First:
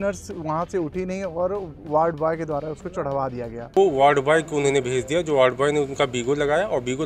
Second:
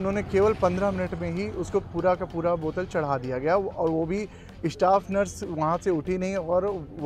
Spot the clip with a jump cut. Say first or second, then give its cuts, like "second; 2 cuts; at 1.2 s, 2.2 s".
first; 1 cut; at 3.8 s